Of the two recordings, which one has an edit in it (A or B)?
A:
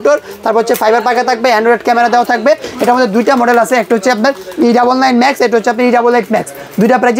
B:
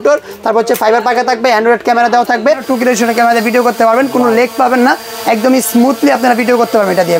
B